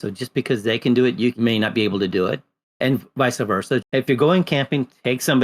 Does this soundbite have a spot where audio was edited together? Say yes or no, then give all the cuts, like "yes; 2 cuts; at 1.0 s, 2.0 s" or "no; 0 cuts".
yes; 3 cuts; at 1.3 s, 2.6 s, 3.8 s